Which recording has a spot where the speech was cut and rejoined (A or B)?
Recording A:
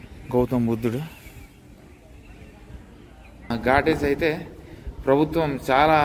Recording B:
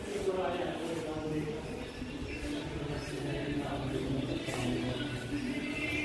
A